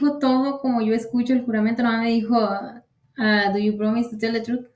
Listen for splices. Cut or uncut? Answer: uncut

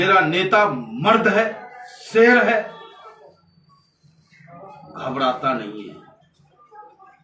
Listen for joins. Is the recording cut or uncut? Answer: uncut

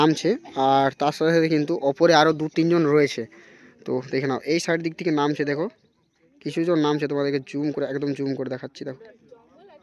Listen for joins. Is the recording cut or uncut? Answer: uncut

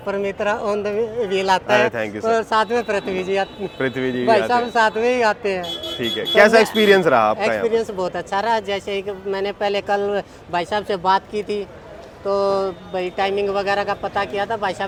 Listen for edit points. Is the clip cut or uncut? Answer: uncut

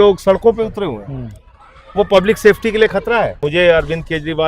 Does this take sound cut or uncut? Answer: cut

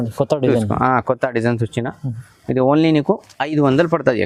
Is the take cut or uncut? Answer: uncut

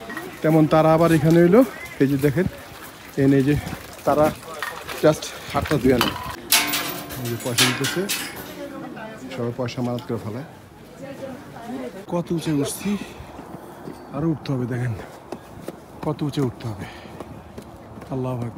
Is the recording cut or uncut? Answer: cut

